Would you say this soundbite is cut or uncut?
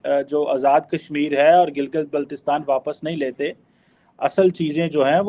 uncut